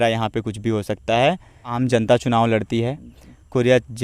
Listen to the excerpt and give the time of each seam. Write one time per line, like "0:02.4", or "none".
0:01.6

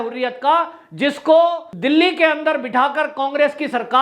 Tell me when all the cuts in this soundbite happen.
0:01.7

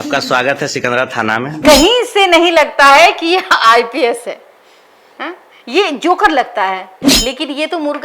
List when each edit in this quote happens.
0:01.6
0:07.0

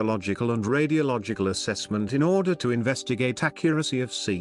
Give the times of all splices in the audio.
0:03.5

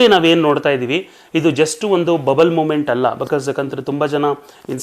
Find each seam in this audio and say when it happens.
none

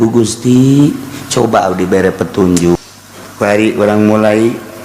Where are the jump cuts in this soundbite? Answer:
0:02.8

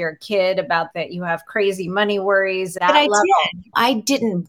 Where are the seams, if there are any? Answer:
0:00.9
0:02.8
0:03.6

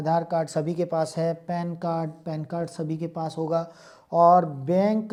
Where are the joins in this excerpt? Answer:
none

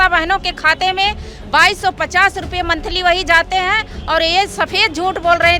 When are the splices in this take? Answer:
none

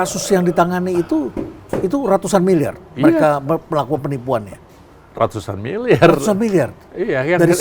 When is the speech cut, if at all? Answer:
none

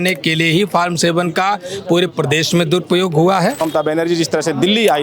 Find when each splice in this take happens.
0:03.6

